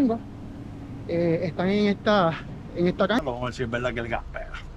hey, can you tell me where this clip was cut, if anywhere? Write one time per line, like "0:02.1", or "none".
0:03.2